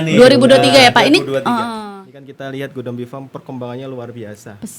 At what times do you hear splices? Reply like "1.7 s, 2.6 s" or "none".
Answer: 1.8 s

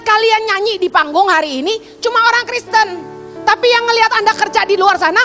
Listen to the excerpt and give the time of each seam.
none

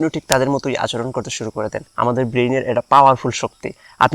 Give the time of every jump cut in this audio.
1.8 s

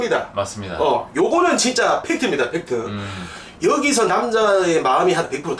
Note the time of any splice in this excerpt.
3.4 s

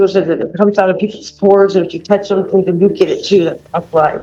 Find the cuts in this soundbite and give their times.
none

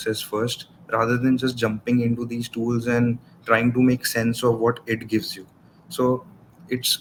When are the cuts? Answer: none

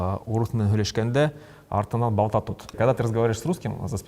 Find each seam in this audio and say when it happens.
2.7 s

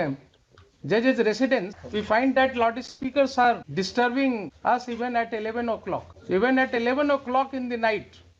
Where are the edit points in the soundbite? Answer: 1.8 s, 3.7 s, 4.5 s, 6.1 s

